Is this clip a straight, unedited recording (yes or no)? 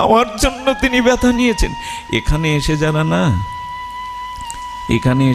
yes